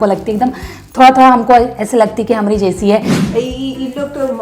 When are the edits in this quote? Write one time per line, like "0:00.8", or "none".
0:03.1